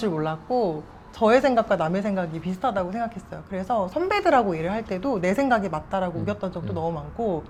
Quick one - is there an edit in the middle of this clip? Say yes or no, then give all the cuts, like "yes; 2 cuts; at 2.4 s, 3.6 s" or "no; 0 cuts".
no; 0 cuts